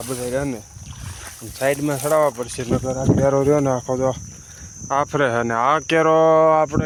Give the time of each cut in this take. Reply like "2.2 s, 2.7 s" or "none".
none